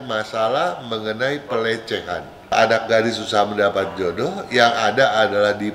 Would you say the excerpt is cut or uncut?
cut